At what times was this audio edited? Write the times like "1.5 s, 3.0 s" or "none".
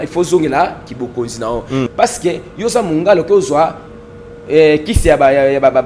1.9 s